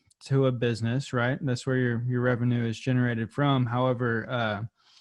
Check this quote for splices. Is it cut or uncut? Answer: uncut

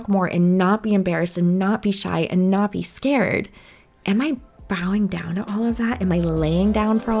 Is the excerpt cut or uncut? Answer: uncut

